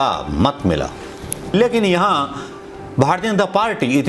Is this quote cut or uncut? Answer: cut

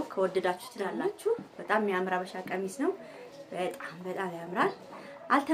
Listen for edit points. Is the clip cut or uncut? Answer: cut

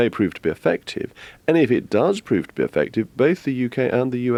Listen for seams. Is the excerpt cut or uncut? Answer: uncut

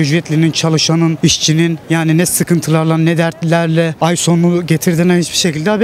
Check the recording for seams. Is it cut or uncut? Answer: cut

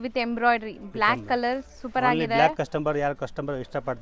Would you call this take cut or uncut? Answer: uncut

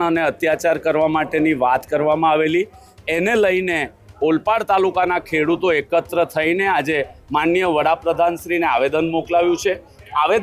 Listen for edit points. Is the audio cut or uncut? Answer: uncut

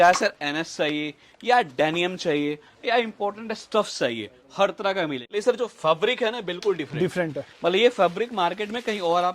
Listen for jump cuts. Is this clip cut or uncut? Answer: cut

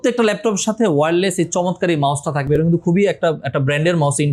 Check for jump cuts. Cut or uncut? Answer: uncut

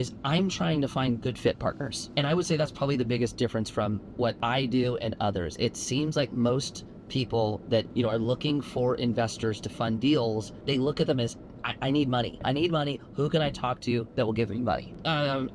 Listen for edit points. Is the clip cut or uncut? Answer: cut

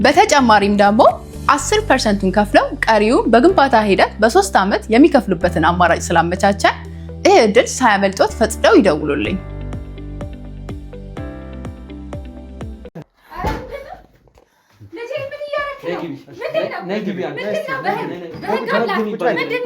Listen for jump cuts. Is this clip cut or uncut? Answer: cut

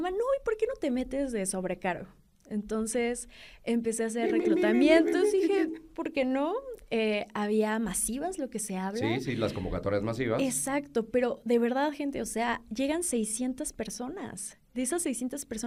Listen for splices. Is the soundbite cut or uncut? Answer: uncut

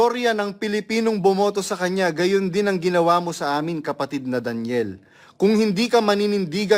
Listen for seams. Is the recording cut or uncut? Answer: uncut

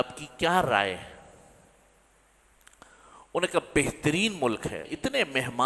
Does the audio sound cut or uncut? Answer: cut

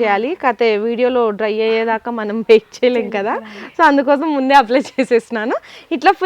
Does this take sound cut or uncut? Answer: uncut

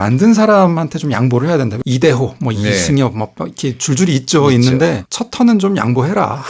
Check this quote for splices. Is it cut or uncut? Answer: cut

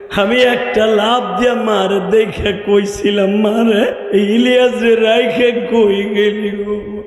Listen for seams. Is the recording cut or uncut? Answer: cut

